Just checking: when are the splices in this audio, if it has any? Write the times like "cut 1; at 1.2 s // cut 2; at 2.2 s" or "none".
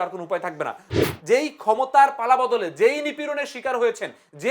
cut 1; at 0.9 s